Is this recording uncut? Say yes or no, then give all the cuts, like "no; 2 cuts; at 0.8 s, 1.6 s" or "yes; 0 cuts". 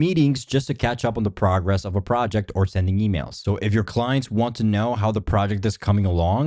yes; 0 cuts